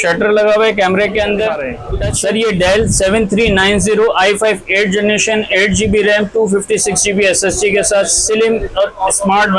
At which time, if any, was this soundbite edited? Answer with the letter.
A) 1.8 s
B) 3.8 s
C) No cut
A